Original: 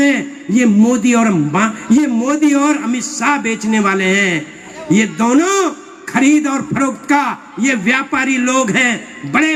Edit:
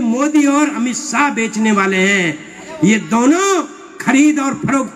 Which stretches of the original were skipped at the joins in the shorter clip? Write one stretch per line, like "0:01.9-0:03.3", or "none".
none